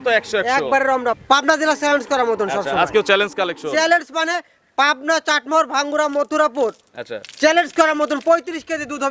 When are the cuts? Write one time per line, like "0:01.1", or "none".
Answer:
0:01.2

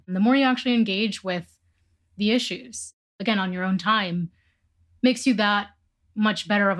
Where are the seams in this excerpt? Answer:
0:03.1

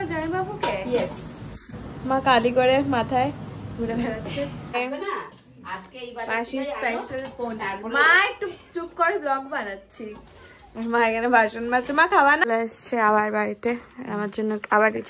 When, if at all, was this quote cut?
0:04.8
0:12.4

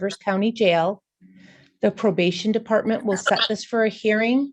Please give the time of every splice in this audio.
none

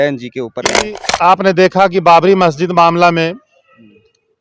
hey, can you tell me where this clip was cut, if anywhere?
0:01.0

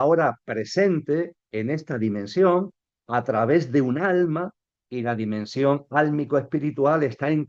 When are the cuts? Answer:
none

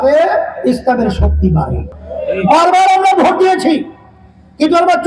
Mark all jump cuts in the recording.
0:01.9

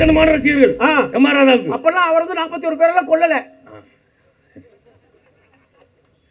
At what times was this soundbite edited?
none

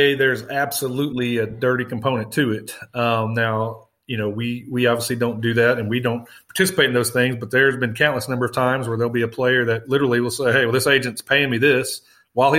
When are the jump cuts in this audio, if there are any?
none

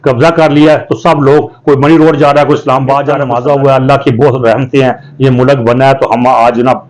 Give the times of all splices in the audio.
0:03.3

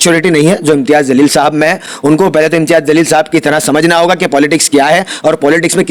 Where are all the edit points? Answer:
none

